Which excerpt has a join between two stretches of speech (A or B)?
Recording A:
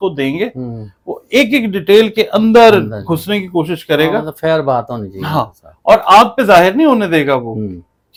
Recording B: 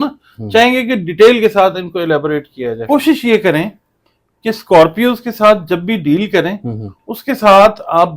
B